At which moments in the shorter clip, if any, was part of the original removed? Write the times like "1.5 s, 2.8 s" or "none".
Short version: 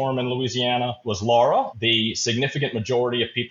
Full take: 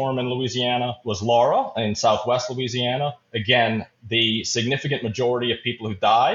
1.7 s